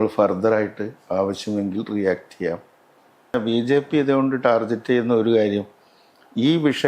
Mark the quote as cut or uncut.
cut